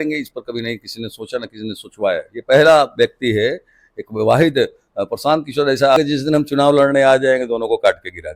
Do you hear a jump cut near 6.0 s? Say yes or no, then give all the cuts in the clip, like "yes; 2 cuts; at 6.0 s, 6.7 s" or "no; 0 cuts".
yes; 1 cut; at 6.0 s